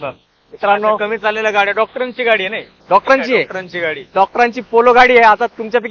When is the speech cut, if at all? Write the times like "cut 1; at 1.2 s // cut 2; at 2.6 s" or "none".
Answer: none